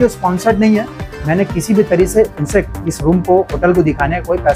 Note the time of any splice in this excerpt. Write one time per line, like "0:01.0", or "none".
none